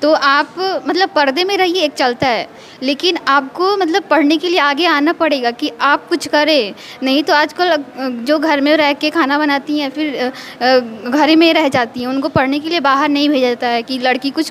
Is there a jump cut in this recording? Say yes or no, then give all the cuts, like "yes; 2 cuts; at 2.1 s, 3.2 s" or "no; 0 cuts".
no; 0 cuts